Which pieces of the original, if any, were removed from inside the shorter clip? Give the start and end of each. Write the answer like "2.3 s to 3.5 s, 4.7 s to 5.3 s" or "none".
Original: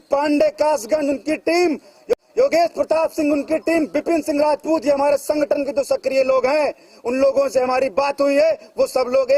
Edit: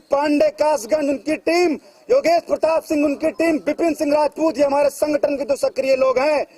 2.0 s to 2.3 s